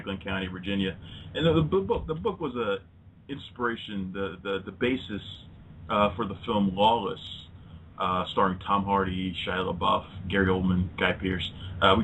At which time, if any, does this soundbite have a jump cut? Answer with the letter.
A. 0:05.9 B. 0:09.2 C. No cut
B